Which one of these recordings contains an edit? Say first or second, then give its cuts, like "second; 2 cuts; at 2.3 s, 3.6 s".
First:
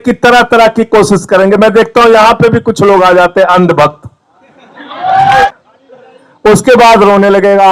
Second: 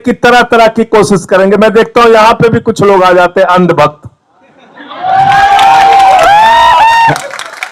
first; 1 cut; at 5.5 s